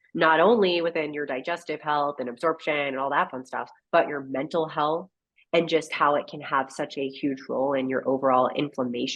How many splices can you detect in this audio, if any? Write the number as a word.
zero